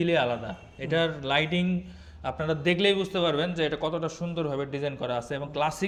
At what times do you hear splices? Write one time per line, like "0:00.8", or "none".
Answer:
none